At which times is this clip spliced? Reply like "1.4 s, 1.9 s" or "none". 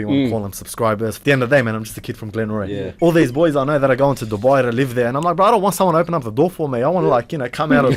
1.2 s, 2.9 s